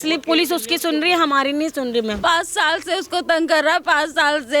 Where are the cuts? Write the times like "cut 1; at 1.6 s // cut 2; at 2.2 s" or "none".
cut 1; at 2.2 s